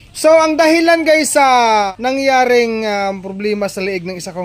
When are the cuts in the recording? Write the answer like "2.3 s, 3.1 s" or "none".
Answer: 1.9 s